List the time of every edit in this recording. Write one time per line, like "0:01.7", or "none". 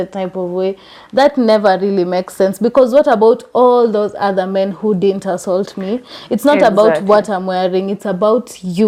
none